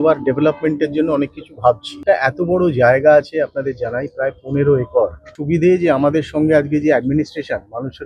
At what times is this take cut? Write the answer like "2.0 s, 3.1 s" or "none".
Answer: 2.0 s, 5.4 s